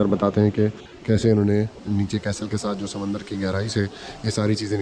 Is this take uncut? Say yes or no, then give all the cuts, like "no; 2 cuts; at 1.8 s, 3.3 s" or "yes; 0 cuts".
yes; 0 cuts